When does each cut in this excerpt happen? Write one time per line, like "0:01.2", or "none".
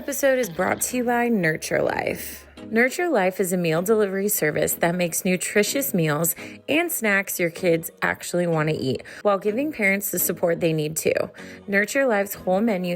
0:02.5